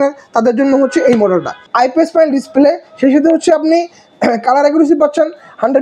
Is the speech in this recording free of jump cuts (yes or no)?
no